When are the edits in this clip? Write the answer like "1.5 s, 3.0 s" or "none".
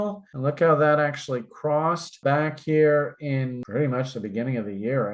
3.6 s